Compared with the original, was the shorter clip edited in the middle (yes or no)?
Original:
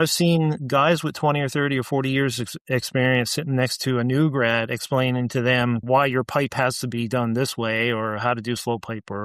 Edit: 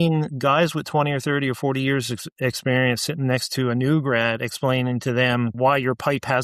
no